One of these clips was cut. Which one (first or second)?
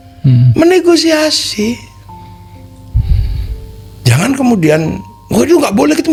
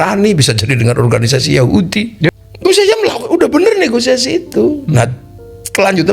second